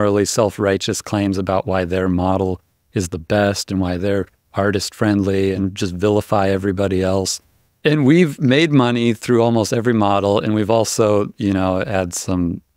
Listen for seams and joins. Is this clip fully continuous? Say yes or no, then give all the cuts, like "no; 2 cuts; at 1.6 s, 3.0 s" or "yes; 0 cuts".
no; 1 cut; at 5.6 s